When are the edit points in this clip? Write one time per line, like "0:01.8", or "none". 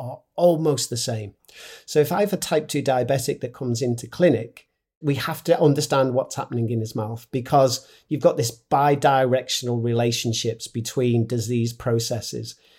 none